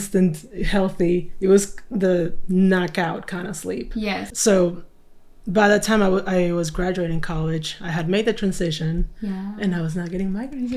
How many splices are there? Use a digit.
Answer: 1